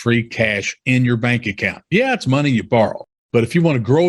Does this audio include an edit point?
yes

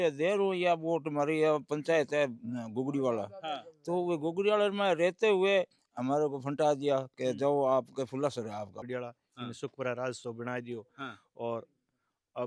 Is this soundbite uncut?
no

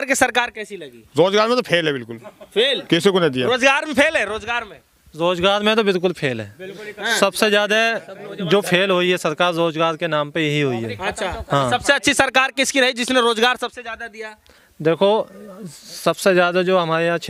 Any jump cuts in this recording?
no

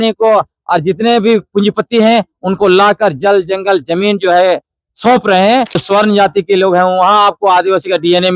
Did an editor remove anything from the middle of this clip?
yes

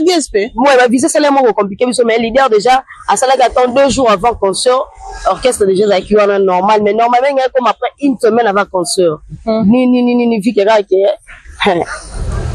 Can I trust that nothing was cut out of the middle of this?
yes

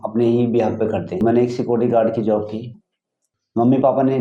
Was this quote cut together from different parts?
yes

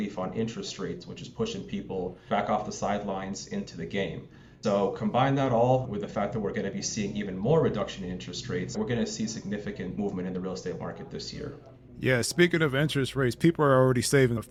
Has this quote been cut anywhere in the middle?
no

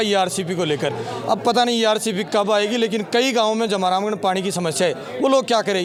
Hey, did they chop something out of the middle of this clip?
no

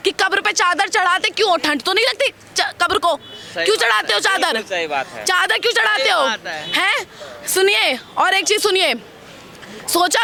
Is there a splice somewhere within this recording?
no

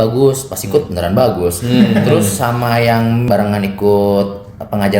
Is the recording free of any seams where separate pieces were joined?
no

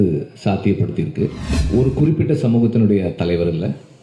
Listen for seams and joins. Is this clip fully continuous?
no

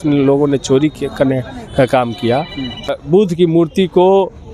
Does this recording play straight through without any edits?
no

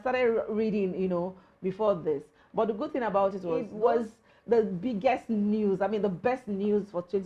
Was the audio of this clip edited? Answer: yes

